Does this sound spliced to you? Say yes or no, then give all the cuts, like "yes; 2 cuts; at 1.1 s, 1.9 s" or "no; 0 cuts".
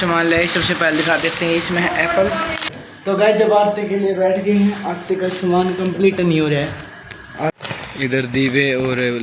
yes; 2 cuts; at 2.8 s, 7.5 s